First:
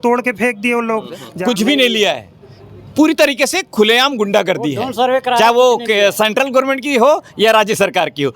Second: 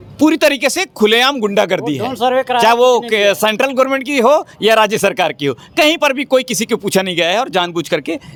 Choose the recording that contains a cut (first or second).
first